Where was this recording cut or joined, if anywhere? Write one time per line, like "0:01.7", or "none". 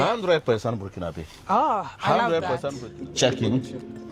0:02.8

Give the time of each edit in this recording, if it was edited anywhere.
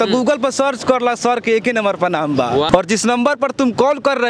0:02.7

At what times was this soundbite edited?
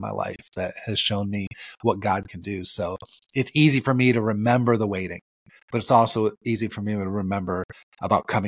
none

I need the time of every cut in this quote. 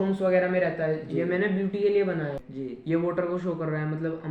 0:02.4

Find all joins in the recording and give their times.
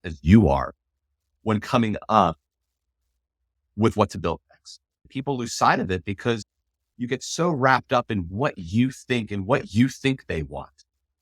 0:05.1
0:06.5

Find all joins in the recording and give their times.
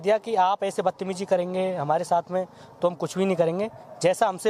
none

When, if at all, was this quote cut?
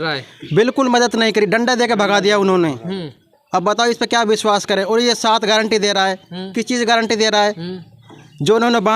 none

